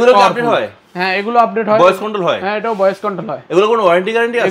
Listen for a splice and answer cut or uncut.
uncut